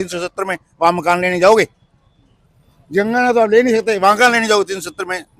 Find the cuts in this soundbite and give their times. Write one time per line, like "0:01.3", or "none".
none